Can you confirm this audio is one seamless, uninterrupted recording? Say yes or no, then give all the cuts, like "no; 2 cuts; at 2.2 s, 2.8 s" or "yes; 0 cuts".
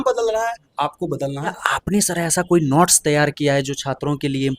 no; 1 cut; at 1.6 s